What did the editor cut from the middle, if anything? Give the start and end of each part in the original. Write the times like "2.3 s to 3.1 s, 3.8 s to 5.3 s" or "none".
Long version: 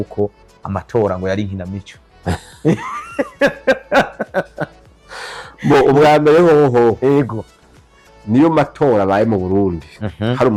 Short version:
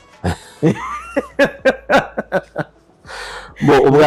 none